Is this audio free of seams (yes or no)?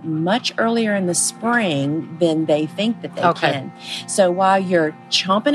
yes